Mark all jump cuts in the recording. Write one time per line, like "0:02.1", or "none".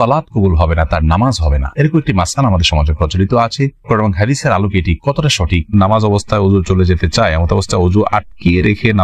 0:05.7